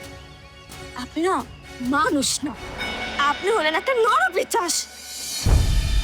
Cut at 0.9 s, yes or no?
yes